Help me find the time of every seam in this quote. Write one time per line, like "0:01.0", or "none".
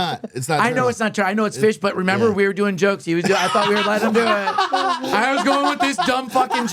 none